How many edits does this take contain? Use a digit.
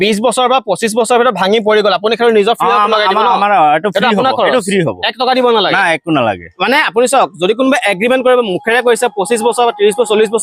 0